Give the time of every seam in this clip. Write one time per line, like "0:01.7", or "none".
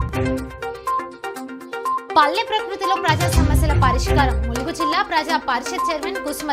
0:01.8